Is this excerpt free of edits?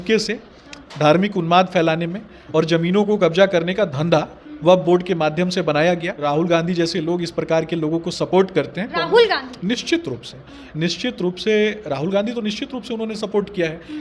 yes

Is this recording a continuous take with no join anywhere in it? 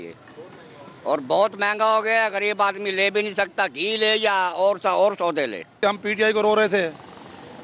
no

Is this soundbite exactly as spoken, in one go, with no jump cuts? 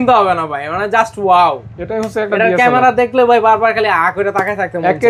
yes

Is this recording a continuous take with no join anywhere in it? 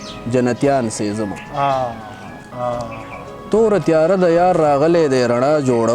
yes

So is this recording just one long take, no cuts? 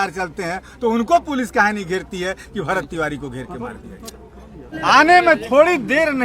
no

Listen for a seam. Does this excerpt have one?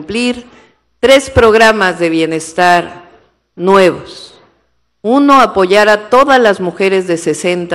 no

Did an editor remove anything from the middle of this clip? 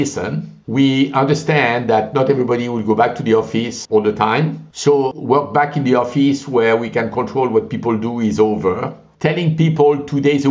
yes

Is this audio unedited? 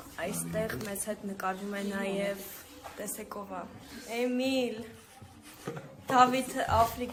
yes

